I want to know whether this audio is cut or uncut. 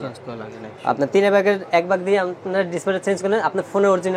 uncut